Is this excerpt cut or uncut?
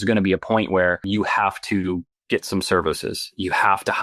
cut